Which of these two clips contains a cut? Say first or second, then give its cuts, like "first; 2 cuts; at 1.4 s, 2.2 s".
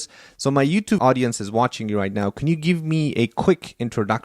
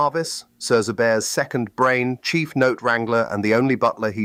first; 1 cut; at 1.0 s